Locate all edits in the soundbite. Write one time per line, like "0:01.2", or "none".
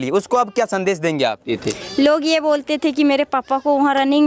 0:01.5

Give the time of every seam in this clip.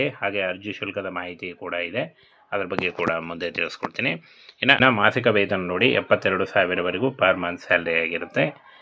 0:04.8

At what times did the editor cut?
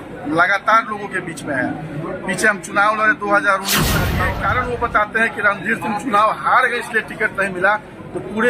0:04.2

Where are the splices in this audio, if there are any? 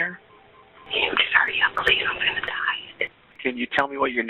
0:03.4

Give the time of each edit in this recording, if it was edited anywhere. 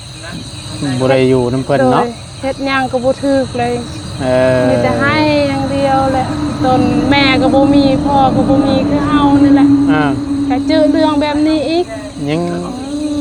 none

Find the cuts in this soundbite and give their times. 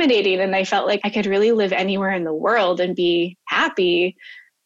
0:01.0

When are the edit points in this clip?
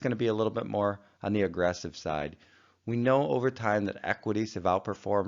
0:02.9

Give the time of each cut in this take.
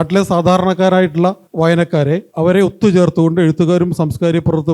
0:01.4
0:02.3

